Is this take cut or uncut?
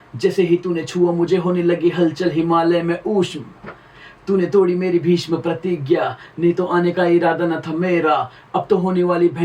uncut